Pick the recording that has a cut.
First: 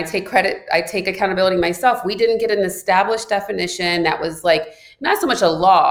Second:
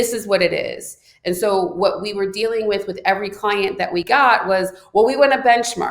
second; 1 cut; at 4.1 s

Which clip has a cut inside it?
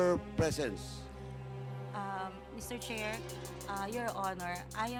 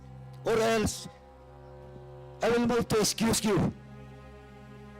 second; 3 cuts; at 1.1 s, 2.4 s, 4.1 s

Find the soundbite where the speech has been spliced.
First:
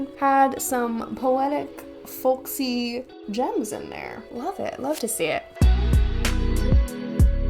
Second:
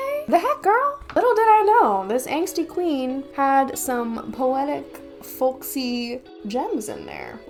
first; 1 cut; at 5.5 s

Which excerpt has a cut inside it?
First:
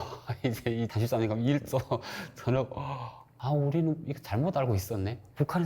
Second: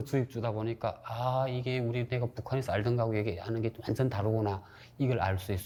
first; 3 cuts; at 0.9 s, 3.3 s, 4.3 s

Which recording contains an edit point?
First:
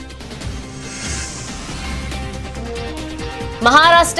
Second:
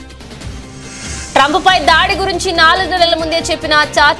second; 1 cut; at 1.0 s

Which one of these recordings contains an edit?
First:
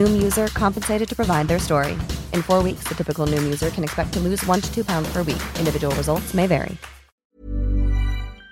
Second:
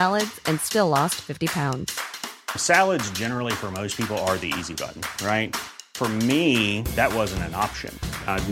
first; 1 cut; at 7.4 s

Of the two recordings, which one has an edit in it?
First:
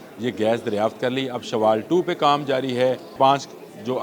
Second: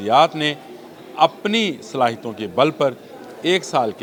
first; 1 cut; at 3.1 s

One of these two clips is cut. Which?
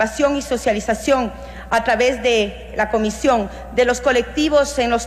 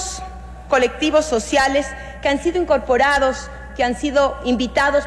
first; 1 cut; at 3.5 s

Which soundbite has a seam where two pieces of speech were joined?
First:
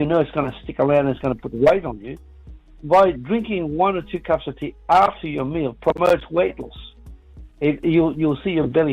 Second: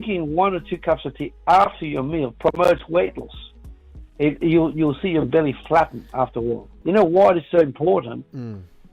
second; 1 cut; at 6.7 s

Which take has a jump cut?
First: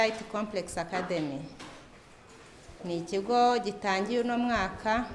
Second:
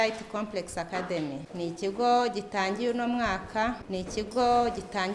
second; 2 cuts; at 1.5 s, 3.8 s

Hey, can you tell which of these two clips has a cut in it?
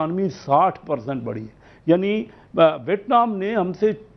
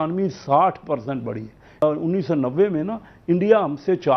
second; 1 cut; at 1.8 s

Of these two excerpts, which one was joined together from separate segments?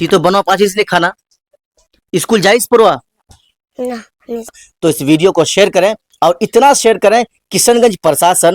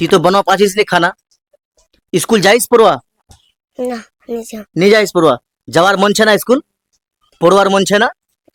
first; 1 cut; at 4.6 s

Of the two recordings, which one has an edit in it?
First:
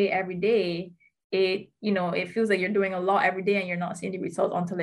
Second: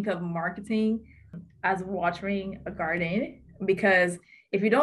second; 1 cut; at 1.3 s

